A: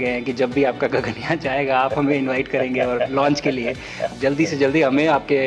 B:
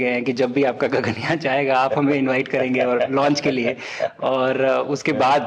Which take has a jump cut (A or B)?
A